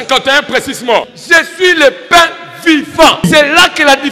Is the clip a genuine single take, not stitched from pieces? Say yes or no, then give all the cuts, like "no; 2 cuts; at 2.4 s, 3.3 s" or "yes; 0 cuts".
no; 2 cuts; at 1.1 s, 3.3 s